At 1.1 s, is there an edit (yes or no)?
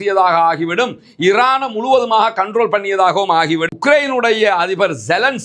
no